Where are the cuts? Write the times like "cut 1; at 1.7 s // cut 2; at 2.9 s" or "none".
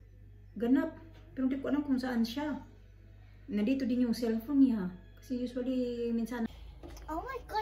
cut 1; at 6.5 s